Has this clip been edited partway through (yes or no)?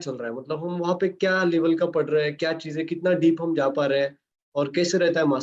no